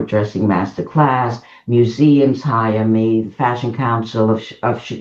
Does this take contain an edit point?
no; 0 cuts

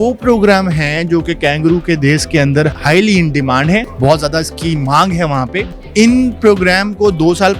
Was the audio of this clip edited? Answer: yes; 3 cuts; at 2.7 s, 3.9 s, 5.8 s

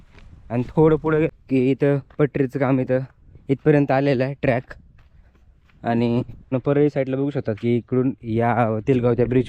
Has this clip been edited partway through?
yes; 2 cuts; at 1.3 s, 6.5 s

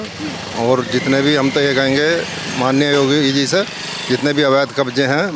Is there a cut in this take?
no; 0 cuts

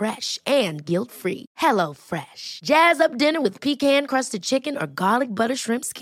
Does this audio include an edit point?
no; 0 cuts

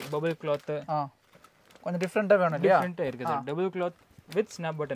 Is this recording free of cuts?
yes; 0 cuts

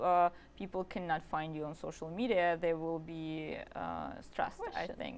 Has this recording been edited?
no; 0 cuts

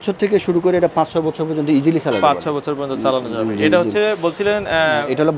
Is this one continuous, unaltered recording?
yes; 0 cuts

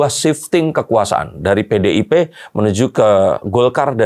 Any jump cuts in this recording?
no; 0 cuts

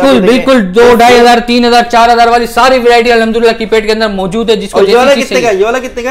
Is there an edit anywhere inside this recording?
no; 0 cuts

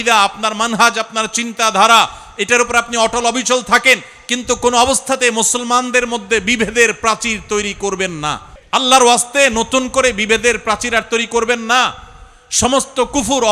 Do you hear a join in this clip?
yes; 1 cut; at 8.5 s

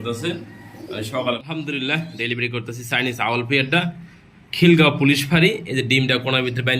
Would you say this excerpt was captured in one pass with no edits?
no; 1 cut; at 1.4 s

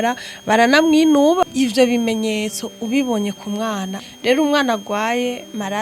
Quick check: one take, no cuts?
no; 2 cuts; at 1.4 s, 4.0 s

